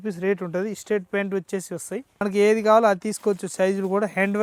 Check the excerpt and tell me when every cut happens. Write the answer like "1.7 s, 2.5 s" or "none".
2.2 s